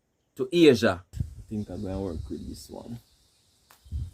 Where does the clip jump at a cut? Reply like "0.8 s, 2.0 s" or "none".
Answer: 1.1 s